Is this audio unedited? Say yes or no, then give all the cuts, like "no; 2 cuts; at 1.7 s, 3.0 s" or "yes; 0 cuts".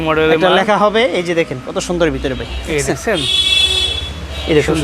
yes; 0 cuts